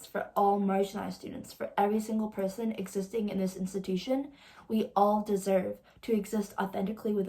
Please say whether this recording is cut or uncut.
uncut